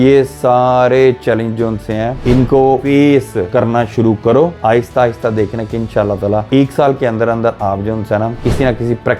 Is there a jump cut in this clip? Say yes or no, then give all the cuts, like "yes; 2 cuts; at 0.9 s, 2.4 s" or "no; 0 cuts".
yes; 3 cuts; at 2.6 s, 3.5 s, 4.6 s